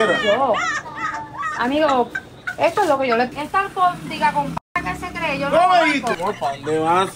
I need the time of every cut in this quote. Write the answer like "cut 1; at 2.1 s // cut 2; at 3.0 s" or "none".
cut 1; at 3.3 s // cut 2; at 6.2 s